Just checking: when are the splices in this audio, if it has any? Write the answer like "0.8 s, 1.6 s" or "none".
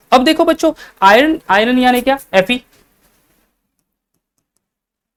none